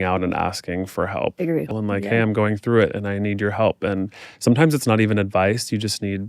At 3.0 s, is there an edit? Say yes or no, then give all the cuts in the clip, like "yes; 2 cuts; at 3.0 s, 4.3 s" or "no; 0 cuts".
no; 1 cut; at 1.8 s